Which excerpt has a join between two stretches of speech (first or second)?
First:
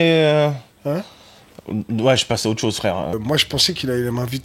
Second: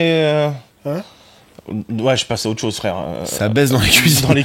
first